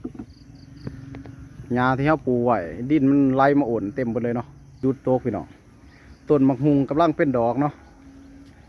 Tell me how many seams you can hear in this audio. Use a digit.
1